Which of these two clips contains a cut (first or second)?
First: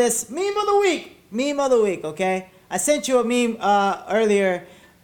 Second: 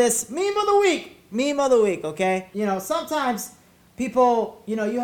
second